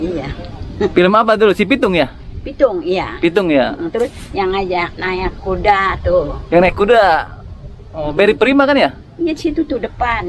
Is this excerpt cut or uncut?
uncut